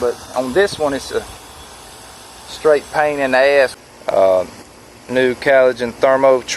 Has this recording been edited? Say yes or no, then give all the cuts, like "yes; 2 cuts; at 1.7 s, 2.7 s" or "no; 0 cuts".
yes; 1 cut; at 3.7 s